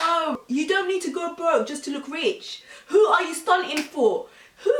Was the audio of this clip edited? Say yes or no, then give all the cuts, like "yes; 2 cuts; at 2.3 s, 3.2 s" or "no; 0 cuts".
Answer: no; 0 cuts